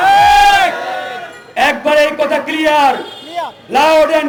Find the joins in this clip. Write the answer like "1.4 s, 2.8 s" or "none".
none